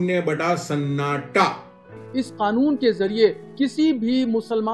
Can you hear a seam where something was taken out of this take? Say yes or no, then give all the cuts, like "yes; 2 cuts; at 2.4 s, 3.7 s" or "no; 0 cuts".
yes; 1 cut; at 2.0 s